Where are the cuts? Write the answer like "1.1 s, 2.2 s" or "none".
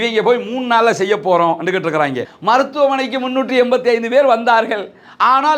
2.2 s